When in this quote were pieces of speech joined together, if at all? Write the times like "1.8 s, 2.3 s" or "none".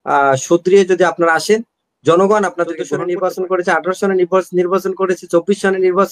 2.8 s